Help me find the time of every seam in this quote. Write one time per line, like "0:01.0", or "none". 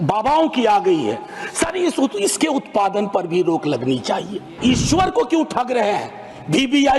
0:04.5